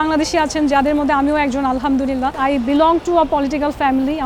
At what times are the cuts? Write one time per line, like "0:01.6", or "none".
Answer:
0:02.4